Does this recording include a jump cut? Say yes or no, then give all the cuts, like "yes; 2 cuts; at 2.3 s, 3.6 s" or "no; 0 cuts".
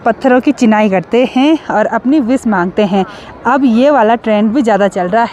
no; 0 cuts